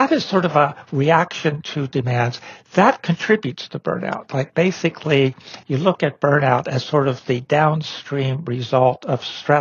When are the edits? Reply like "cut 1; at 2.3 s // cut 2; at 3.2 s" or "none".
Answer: none